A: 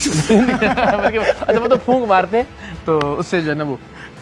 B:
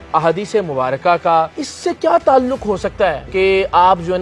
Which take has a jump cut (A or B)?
B